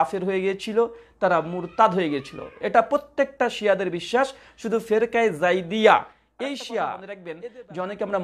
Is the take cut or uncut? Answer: cut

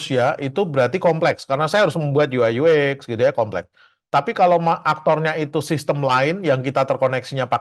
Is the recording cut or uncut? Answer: uncut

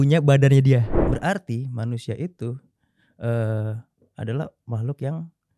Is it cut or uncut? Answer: cut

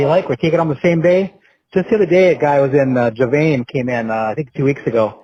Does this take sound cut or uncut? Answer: uncut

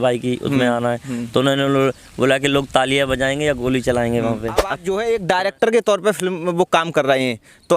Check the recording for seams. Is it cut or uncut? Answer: cut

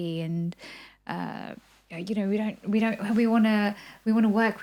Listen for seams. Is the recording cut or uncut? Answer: uncut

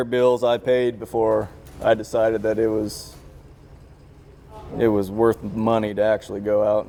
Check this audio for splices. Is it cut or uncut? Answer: uncut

